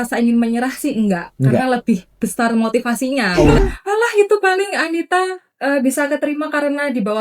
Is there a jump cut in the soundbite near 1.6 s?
no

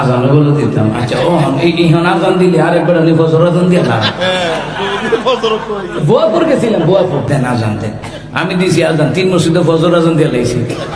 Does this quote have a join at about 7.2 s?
yes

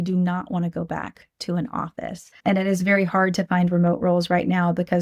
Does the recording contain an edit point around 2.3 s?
yes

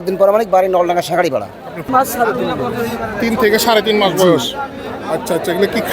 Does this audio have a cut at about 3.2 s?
no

